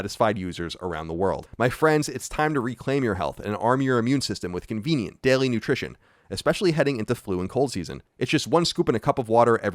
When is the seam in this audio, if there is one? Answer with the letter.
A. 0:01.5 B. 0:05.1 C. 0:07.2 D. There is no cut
A